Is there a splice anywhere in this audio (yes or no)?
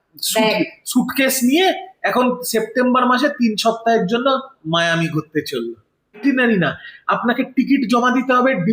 yes